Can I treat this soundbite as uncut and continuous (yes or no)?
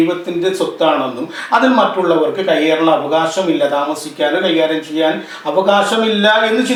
yes